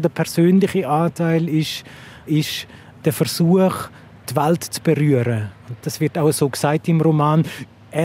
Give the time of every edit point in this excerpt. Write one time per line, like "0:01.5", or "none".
0:05.8

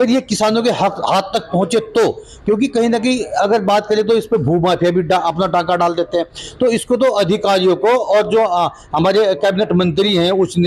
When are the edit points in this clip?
none

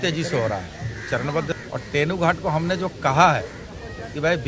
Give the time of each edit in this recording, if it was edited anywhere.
0:01.6

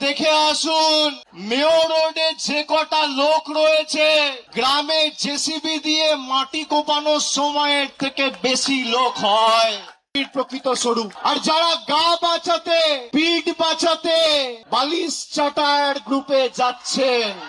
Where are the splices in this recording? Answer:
0:01.3
0:04.4
0:10.1
0:11.1
0:13.0
0:14.6

